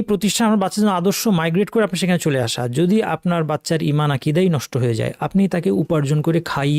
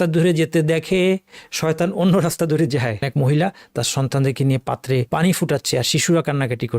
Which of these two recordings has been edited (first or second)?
second